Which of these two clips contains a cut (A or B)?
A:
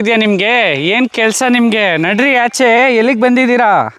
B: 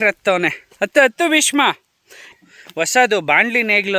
B